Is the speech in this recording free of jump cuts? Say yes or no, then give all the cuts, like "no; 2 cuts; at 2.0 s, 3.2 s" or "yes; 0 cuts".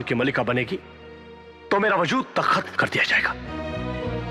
no; 1 cut; at 3.4 s